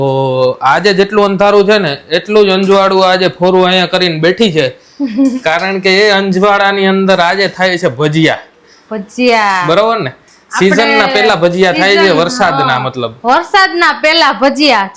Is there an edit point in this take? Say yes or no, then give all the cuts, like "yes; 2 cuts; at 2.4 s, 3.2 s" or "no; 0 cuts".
no; 0 cuts